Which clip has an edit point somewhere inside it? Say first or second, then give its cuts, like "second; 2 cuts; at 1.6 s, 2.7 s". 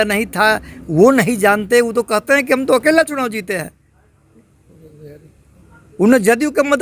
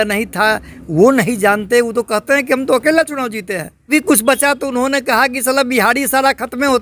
second; 1 cut; at 3.9 s